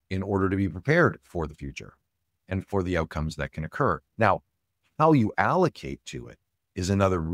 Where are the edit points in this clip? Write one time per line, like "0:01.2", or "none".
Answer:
0:04.0

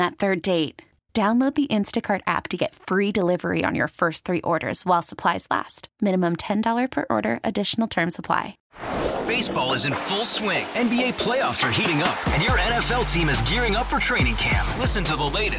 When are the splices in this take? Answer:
0:08.6

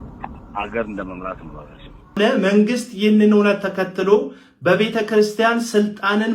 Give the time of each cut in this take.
0:02.2

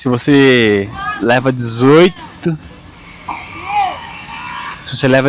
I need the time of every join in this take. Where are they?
none

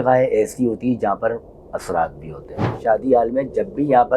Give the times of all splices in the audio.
0:02.7

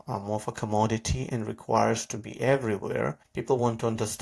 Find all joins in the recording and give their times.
0:03.3

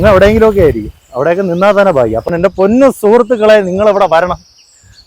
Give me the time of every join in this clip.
0:02.3

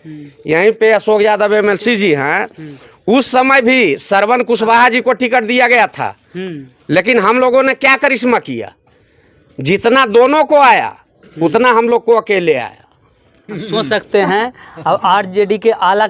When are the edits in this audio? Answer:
none

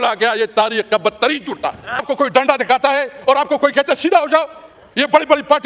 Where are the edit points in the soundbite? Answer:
0:02.0

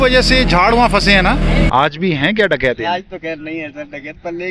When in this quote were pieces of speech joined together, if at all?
0:01.7

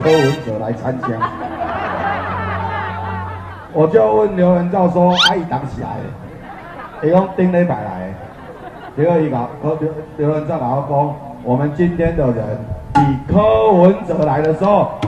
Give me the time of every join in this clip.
none

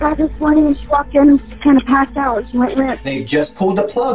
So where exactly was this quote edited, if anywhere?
0:03.1

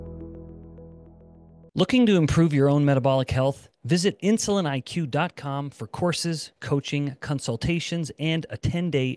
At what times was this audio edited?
0:01.6

